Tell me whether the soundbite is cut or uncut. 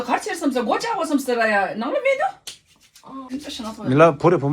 cut